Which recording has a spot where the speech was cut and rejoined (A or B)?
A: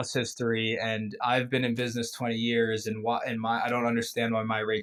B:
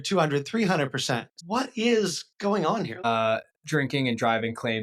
B